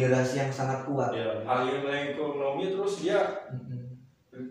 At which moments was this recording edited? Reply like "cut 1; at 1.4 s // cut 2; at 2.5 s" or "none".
cut 1; at 1.4 s